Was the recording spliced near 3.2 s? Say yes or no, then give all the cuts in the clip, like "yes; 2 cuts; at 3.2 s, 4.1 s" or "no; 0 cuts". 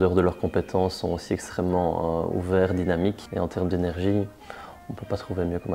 yes; 1 cut; at 3.2 s